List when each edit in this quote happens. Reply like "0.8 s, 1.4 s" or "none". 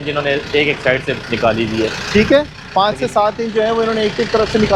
none